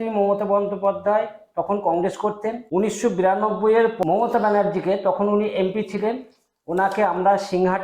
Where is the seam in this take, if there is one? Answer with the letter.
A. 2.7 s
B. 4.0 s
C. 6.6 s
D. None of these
B